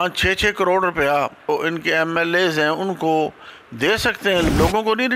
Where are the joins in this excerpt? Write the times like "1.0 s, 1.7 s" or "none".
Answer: 1.5 s, 4.5 s